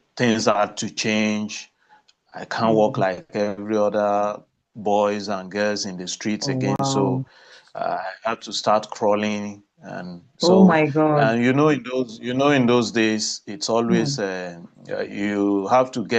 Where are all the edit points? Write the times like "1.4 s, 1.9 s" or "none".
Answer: none